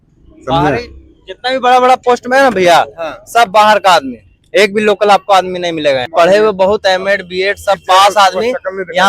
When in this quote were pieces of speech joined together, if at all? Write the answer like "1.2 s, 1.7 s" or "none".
6.1 s